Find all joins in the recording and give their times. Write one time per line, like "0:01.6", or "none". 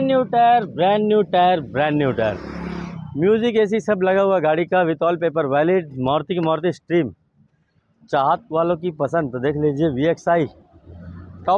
none